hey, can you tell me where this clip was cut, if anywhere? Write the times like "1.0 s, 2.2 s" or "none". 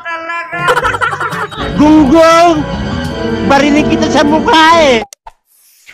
5.0 s